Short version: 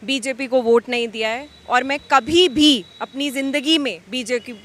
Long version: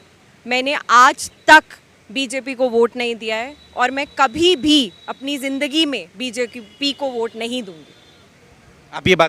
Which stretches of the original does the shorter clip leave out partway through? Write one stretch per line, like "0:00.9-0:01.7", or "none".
none